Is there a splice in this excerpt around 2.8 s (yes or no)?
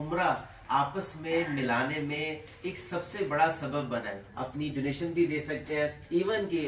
no